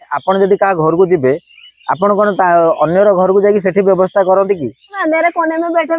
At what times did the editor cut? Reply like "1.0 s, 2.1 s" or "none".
5.0 s